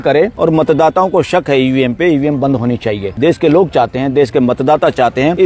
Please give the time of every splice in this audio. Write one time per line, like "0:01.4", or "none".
0:03.1